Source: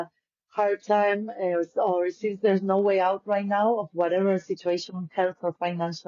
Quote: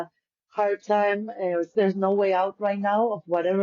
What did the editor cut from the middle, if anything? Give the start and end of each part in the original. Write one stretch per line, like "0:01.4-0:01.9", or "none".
0:01.7-0:02.4